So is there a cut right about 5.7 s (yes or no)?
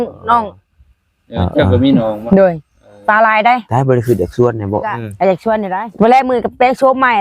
yes